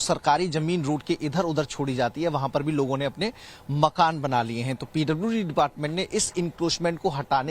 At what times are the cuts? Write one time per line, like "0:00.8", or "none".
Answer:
0:01.4